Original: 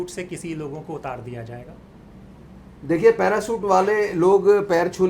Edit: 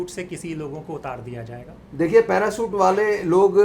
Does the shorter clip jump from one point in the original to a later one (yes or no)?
yes